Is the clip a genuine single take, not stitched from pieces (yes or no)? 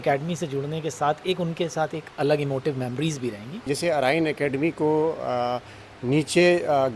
no